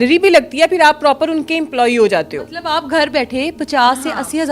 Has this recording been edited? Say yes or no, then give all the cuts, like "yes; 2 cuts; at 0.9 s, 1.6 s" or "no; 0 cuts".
no; 0 cuts